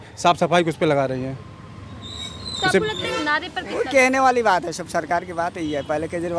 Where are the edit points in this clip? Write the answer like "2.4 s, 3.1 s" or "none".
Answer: 3.0 s